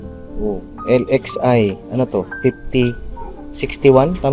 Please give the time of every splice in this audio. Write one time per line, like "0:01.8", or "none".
none